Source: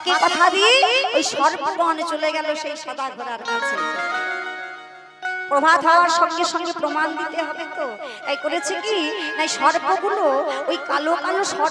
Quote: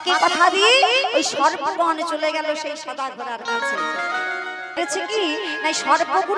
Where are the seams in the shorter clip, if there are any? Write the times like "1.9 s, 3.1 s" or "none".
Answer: 4.8 s